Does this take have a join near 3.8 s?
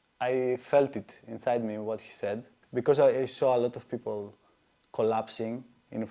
no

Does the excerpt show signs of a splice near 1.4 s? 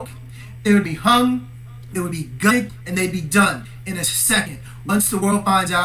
yes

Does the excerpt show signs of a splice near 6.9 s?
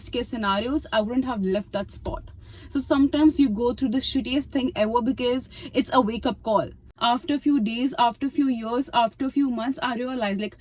yes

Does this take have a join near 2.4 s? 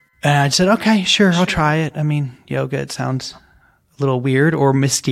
no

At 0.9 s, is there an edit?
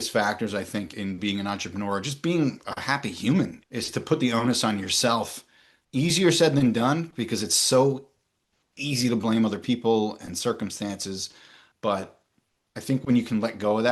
yes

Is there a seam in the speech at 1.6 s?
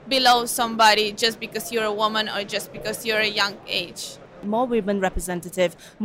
no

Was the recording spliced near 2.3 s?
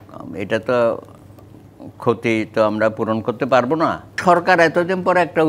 no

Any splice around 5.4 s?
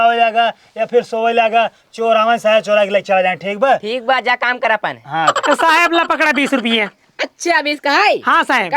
yes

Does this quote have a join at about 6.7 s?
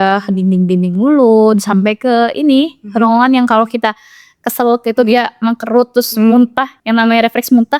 yes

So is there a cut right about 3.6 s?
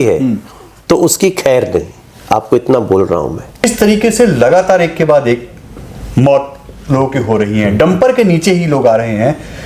yes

